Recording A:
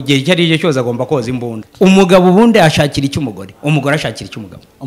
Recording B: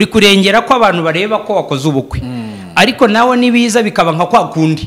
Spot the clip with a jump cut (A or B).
A